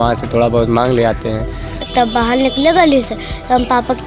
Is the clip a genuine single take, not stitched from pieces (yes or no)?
no